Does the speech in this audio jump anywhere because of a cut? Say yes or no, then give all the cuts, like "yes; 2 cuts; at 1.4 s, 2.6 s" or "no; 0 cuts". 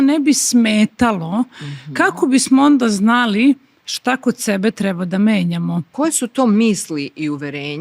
yes; 1 cut; at 5.9 s